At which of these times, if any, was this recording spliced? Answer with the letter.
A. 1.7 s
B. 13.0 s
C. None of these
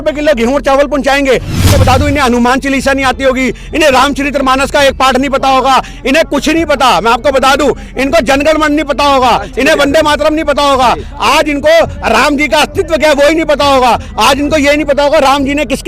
A